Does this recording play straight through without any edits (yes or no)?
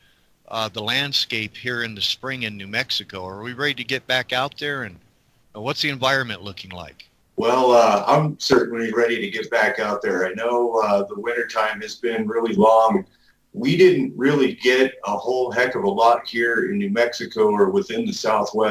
yes